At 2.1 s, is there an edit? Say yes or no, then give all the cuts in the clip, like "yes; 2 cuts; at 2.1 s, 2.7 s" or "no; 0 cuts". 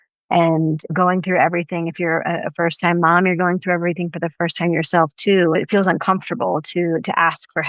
no; 1 cut; at 5.6 s